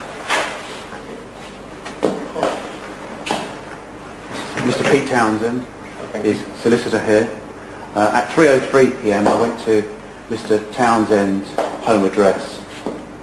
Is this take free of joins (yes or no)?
yes